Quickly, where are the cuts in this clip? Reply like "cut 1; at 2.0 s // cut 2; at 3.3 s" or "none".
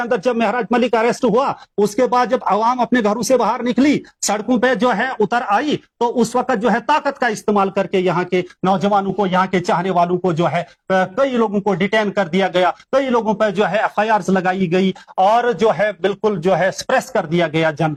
none